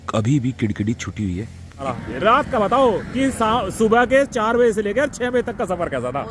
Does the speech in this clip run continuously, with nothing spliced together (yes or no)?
no